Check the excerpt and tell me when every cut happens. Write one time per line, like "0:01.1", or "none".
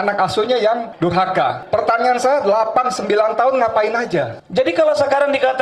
0:01.1
0:04.4